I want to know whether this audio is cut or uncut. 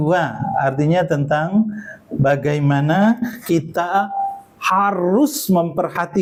uncut